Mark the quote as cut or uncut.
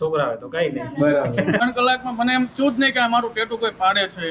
cut